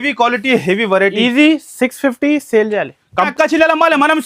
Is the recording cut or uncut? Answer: cut